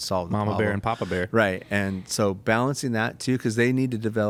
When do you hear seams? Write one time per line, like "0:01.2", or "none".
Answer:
none

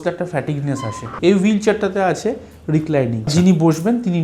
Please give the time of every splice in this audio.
0:01.1
0:03.3

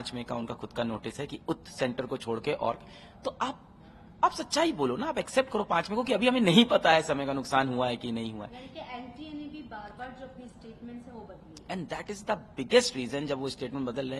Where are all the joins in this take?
none

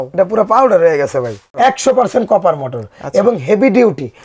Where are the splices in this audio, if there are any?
0:01.5

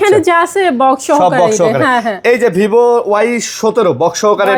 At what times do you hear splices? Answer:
none

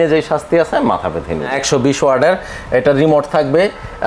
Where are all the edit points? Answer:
0:01.5

